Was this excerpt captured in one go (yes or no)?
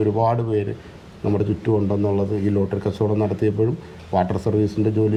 yes